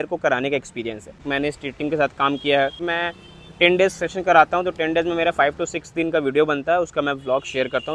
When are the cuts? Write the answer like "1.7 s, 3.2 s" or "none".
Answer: 1.2 s, 2.7 s